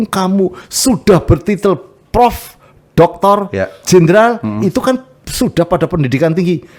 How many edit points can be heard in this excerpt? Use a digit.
0